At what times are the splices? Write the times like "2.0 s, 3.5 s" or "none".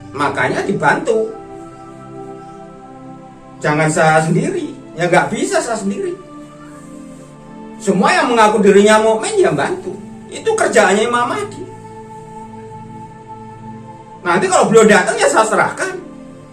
2.0 s, 3.6 s, 6.3 s, 7.8 s, 11.9 s, 14.0 s